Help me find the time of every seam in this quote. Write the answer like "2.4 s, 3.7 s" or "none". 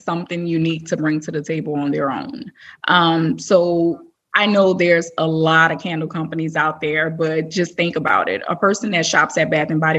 none

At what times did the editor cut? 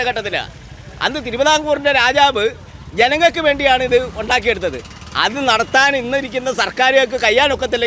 none

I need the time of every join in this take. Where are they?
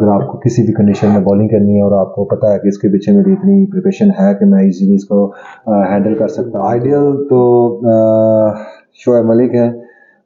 6.5 s

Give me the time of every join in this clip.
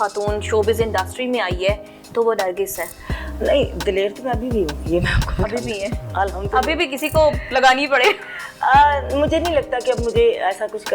none

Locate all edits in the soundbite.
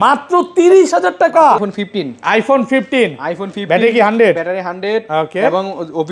1.7 s

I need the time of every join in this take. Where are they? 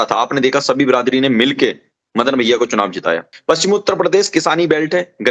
3.3 s

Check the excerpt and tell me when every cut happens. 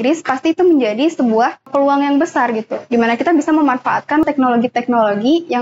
1.7 s, 4.2 s

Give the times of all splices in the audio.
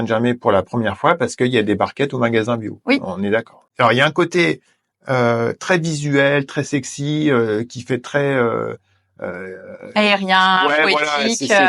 3.6 s

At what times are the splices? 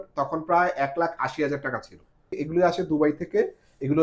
2.4 s

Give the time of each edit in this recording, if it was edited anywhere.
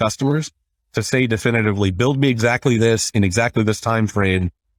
none

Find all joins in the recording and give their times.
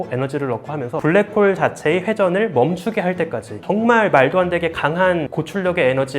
1.0 s, 3.6 s, 5.3 s

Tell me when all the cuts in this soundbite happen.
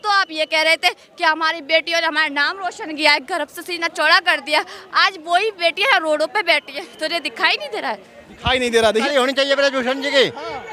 none

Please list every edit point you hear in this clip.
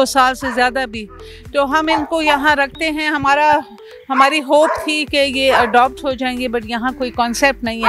none

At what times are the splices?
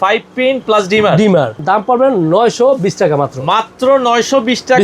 1.6 s

